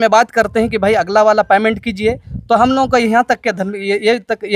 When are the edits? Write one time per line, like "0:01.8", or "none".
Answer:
none

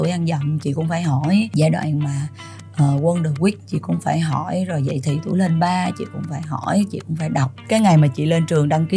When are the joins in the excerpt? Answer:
0:01.5
0:07.6

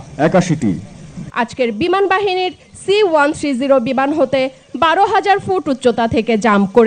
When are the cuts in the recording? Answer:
0:01.2

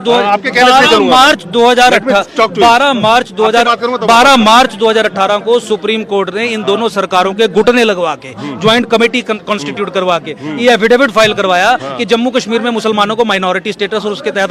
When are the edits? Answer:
none

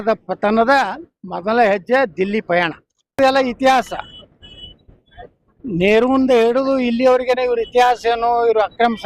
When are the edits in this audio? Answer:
0:03.2

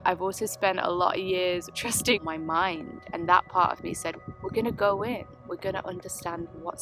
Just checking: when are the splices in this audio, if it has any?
0:01.8

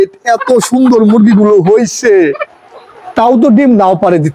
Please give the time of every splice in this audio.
0:02.5

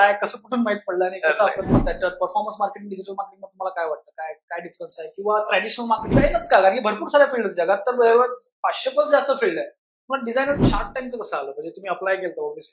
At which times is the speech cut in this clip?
0:01.7
0:06.1
0:10.6

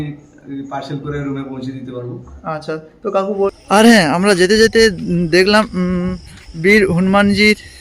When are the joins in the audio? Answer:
0:03.5

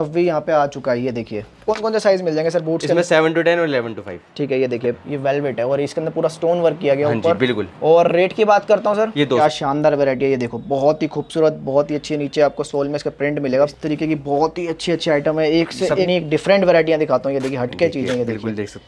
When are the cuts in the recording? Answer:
0:01.6
0:05.1
0:09.4
0:13.7
0:16.1

